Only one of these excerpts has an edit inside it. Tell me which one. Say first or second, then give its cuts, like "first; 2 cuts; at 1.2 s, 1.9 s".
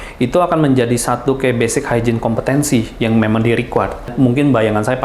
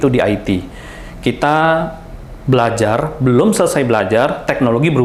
first; 1 cut; at 4.1 s